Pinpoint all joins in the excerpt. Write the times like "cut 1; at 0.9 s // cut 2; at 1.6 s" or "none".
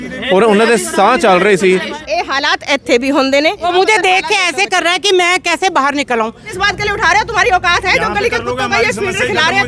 cut 1; at 2.0 s // cut 2; at 3.6 s // cut 3; at 6.5 s